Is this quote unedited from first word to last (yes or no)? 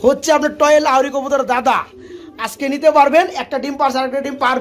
yes